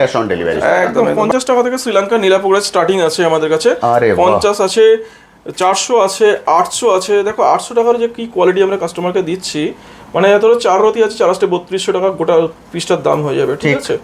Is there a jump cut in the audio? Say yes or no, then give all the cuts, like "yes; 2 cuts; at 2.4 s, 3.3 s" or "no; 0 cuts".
yes; 1 cut; at 1.0 s